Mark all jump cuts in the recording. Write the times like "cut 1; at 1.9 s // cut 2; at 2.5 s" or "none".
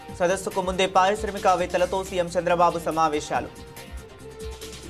cut 1; at 3.6 s